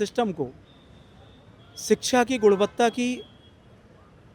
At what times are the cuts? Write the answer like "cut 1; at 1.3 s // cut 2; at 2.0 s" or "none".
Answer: none